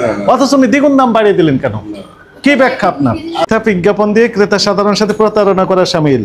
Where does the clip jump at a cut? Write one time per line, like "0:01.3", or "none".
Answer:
0:03.4